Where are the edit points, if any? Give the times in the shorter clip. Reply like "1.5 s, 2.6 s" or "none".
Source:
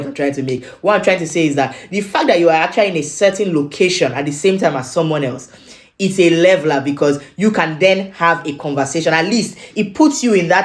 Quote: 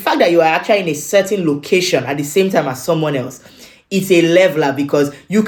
none